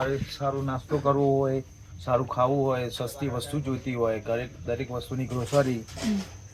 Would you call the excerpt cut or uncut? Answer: uncut